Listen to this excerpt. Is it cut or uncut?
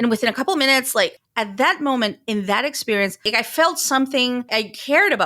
cut